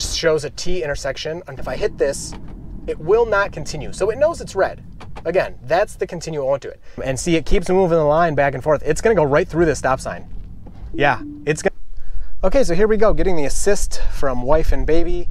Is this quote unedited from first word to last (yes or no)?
no